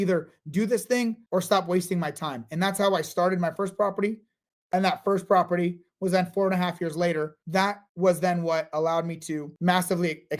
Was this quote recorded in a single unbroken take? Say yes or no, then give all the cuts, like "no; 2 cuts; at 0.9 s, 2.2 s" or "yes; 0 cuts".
no; 2 cuts; at 7.4 s, 9.5 s